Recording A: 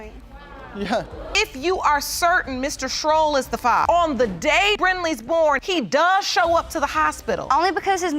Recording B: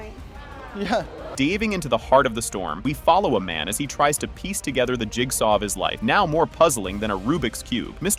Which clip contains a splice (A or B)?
A